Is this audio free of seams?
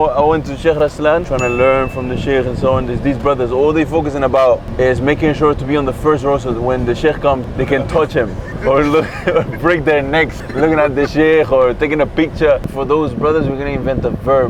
no; 2 cuts; at 1.3 s, 12.7 s

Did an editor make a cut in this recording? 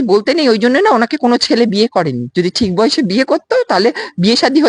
yes; 1 cut; at 2.2 s

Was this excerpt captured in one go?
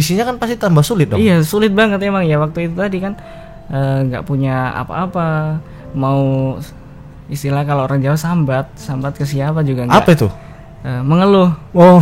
yes; 0 cuts

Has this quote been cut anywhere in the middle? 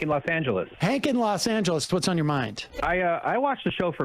yes; 1 cut; at 2.8 s

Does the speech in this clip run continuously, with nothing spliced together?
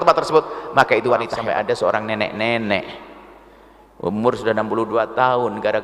no; 1 cut; at 1.3 s

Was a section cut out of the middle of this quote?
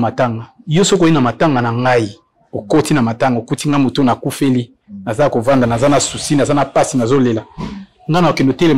no; 0 cuts

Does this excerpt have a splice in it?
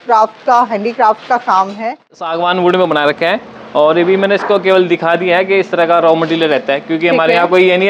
yes; 1 cut; at 2.2 s

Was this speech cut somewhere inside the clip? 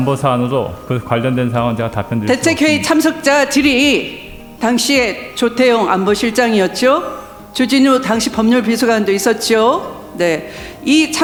no; 0 cuts

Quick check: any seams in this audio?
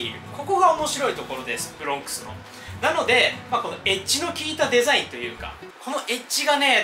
no; 0 cuts

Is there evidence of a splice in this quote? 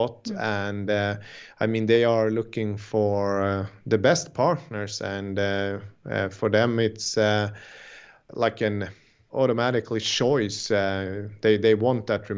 no; 0 cuts

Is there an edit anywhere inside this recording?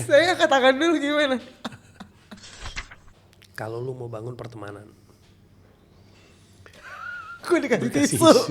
yes; 1 cut; at 2.7 s

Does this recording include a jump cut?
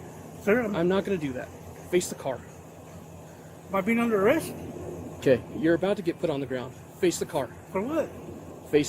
no; 0 cuts

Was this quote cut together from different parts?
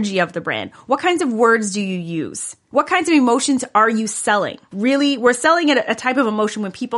yes; 1 cut; at 4.7 s

